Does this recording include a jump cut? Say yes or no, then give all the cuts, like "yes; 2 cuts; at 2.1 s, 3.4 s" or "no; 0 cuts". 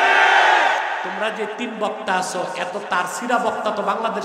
yes; 1 cut; at 1.1 s